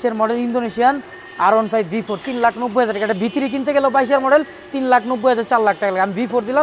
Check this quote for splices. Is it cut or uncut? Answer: uncut